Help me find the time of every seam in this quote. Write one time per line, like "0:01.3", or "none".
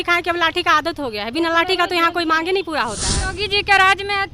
0:03.2

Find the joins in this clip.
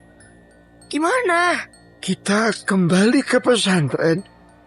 none

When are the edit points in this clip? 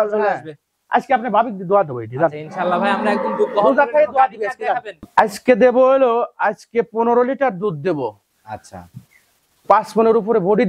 0:05.0

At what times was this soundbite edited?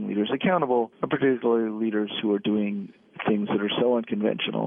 0:01.0

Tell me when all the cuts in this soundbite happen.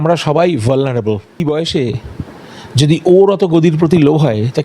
0:01.4

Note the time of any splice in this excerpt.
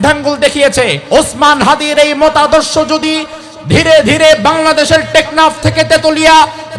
0:01.0

